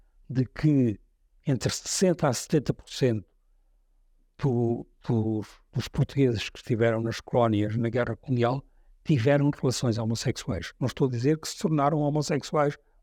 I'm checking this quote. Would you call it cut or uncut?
uncut